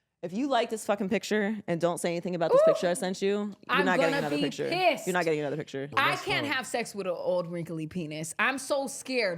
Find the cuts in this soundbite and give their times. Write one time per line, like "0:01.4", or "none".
0:05.8